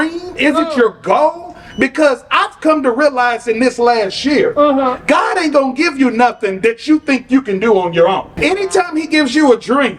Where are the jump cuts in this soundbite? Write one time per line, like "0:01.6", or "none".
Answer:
0:08.3